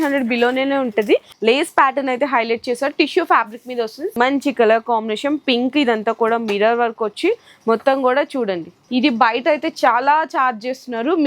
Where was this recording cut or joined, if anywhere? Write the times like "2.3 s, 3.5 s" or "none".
1.3 s, 4.1 s, 8.8 s